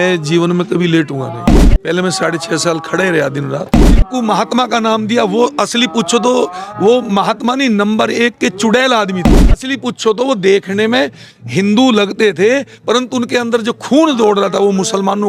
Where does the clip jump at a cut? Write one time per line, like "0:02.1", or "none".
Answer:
0:01.4
0:04.0
0:09.6